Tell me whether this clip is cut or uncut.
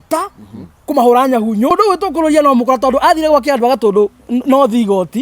cut